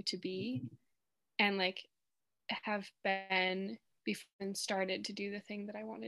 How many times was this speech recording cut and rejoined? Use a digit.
0